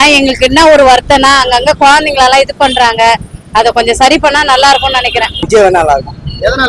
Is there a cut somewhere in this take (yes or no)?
yes